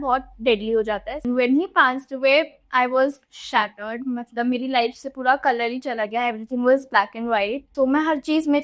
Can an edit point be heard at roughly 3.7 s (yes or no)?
no